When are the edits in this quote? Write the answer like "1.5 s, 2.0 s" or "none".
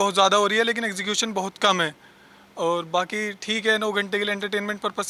none